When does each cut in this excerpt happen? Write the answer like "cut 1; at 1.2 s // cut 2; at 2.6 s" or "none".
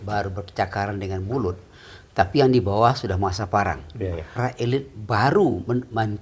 cut 1; at 4.4 s